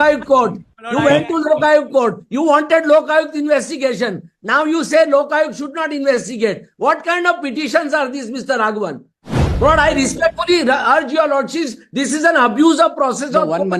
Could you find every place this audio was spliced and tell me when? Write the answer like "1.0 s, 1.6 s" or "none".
none